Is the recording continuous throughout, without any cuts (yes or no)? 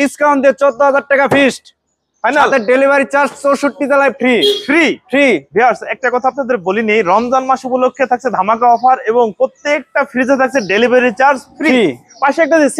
yes